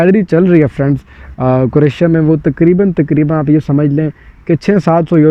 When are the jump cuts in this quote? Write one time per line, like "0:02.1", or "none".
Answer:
none